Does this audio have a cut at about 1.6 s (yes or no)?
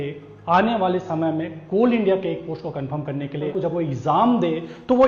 no